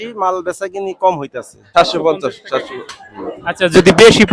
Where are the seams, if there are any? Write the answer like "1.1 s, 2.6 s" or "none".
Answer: 1.6 s